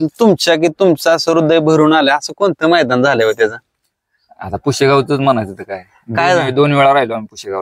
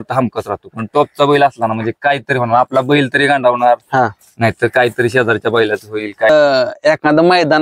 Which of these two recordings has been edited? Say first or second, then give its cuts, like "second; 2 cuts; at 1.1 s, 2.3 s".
second; 1 cut; at 6.3 s